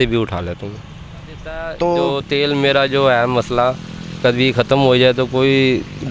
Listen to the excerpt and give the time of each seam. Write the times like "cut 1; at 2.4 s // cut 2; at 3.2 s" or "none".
cut 1; at 2.2 s